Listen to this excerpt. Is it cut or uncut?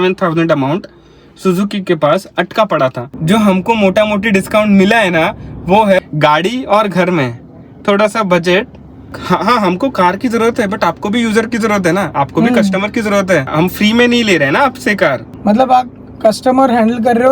cut